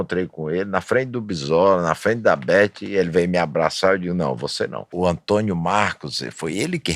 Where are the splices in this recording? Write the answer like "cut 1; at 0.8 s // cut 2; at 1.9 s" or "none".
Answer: cut 1; at 4.8 s